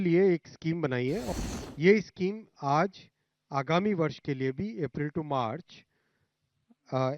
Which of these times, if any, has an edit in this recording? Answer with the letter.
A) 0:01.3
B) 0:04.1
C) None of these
A